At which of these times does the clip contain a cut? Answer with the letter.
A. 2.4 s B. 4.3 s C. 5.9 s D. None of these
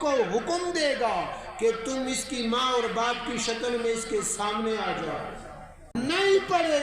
C